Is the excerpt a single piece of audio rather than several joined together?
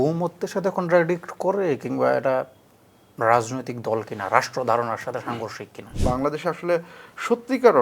no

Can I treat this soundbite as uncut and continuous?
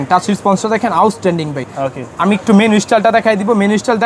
yes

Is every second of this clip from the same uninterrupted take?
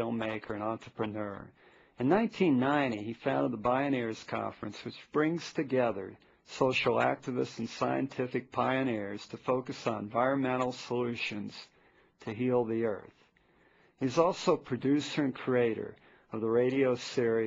yes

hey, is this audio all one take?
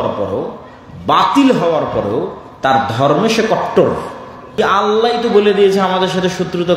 no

